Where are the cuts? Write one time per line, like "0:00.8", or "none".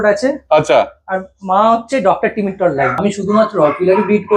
0:03.0